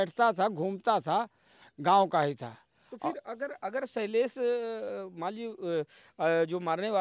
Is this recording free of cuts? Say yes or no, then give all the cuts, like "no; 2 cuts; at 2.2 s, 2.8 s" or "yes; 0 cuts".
yes; 0 cuts